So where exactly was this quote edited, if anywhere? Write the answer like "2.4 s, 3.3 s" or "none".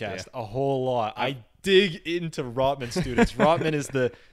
none